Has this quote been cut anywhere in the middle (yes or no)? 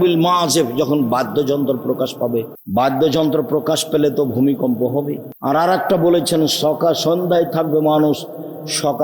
yes